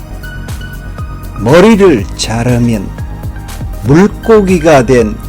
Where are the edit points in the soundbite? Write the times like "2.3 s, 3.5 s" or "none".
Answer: 1.4 s

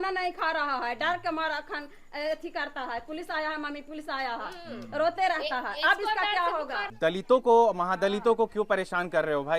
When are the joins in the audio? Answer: 6.8 s

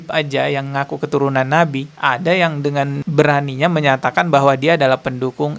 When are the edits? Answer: 3.0 s

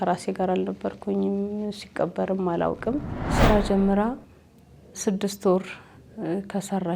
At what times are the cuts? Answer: 3.2 s

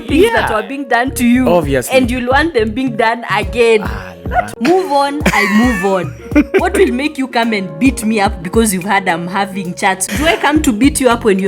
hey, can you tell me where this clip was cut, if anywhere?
4.5 s, 10.1 s

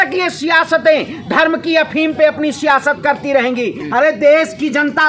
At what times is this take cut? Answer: 3.8 s

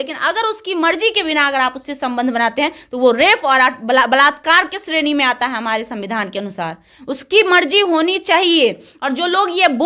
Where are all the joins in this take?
none

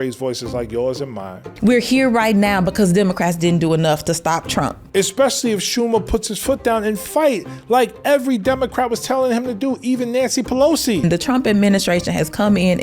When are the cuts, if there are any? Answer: 1.4 s, 4.8 s, 11.0 s

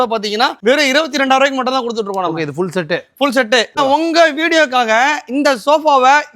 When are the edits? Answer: 3.8 s

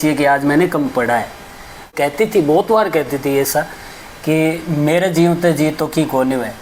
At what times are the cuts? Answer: 1.9 s

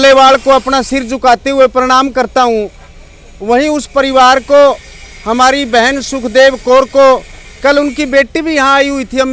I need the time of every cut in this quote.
none

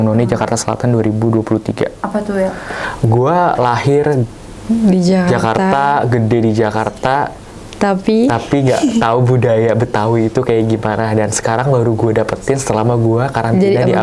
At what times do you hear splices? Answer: 2.9 s

